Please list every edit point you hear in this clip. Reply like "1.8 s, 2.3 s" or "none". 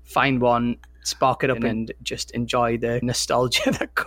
1.6 s, 3.0 s